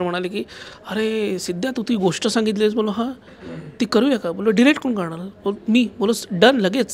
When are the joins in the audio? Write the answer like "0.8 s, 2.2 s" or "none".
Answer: none